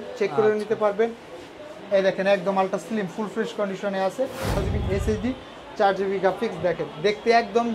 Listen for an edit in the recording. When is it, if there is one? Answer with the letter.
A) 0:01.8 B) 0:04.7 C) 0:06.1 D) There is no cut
B